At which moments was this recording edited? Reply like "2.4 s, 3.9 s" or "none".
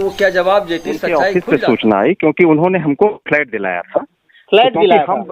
1.0 s